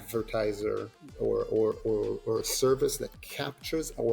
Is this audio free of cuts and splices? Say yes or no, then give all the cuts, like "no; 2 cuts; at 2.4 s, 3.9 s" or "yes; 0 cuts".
no; 1 cut; at 1.0 s